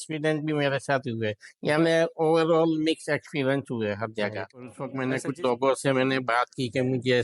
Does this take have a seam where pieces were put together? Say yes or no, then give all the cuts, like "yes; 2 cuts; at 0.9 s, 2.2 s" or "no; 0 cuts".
yes; 1 cut; at 4.8 s